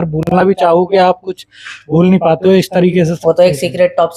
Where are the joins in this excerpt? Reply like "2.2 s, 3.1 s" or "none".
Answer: 3.2 s

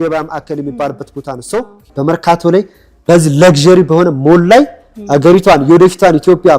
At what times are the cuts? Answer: 1.9 s

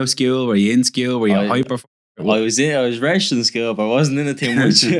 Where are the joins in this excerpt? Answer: none

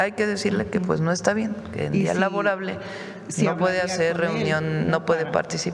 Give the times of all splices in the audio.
none

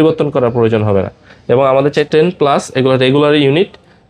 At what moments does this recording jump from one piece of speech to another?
2.1 s

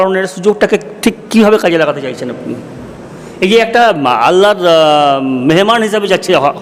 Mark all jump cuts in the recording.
none

